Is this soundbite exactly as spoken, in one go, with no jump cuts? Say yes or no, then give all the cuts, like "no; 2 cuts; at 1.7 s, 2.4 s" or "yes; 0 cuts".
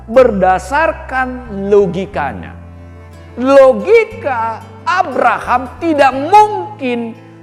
yes; 0 cuts